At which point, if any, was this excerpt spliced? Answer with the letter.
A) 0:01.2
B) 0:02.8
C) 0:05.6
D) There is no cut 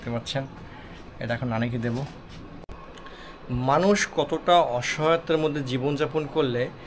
B